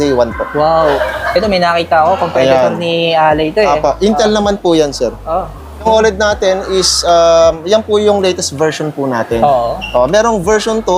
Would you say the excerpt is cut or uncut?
cut